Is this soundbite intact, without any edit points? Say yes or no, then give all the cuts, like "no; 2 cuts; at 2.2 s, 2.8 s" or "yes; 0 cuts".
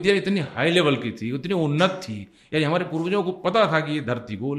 yes; 0 cuts